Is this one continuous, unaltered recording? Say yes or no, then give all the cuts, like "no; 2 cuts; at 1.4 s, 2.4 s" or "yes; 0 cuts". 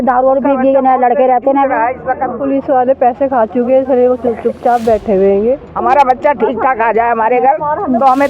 no; 2 cuts; at 2.4 s, 5.7 s